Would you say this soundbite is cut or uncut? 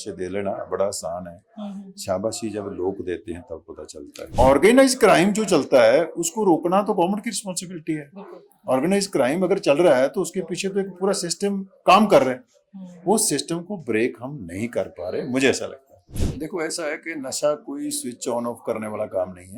cut